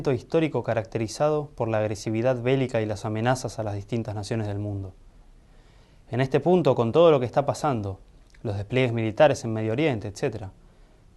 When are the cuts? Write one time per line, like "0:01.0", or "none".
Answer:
0:07.8